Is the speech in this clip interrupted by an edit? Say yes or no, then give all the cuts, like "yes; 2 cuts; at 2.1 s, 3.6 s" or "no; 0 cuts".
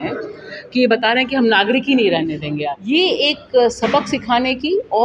yes; 1 cut; at 2.8 s